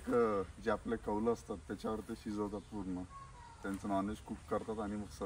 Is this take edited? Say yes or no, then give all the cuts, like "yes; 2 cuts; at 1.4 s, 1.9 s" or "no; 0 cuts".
no; 0 cuts